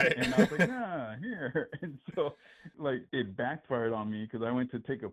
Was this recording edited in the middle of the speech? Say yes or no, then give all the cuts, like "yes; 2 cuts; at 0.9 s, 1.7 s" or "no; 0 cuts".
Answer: yes; 1 cut; at 2.8 s